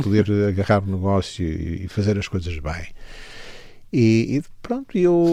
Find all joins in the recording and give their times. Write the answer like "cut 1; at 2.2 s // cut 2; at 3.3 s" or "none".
none